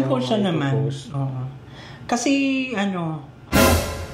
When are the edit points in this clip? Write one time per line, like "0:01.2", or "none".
none